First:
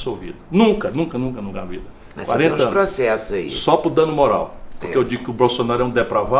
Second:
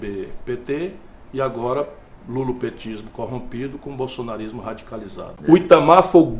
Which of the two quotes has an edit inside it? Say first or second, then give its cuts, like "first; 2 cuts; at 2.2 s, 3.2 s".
second; 1 cut; at 5.3 s